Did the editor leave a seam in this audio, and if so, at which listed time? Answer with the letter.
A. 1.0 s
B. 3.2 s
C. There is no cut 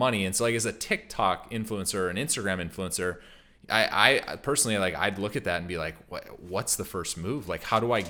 C